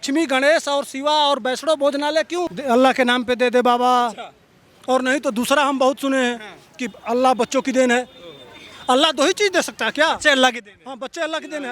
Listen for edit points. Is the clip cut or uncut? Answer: cut